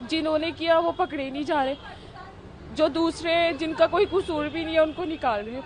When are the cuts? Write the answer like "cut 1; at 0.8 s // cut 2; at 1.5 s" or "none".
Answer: none